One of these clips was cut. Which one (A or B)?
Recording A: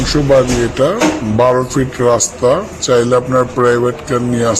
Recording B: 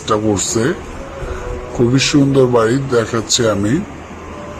A